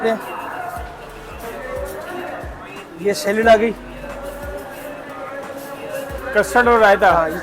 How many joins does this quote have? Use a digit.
1